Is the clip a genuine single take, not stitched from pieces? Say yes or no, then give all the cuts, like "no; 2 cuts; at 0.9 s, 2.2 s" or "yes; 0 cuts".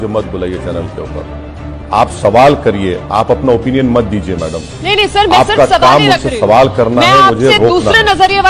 yes; 0 cuts